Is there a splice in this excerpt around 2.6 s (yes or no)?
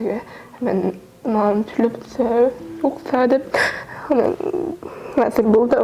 no